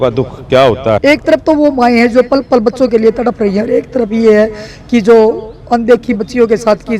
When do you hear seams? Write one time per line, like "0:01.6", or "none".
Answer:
0:01.0